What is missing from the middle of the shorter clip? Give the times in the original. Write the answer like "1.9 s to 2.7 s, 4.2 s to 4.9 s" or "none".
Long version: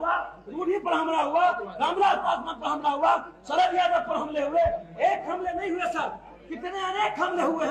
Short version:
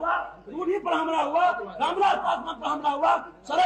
none